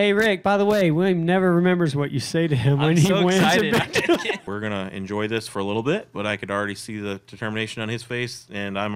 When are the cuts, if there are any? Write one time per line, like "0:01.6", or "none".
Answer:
0:04.5